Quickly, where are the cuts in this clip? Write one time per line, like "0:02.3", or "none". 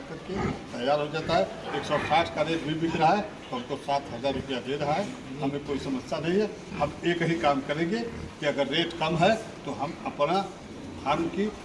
none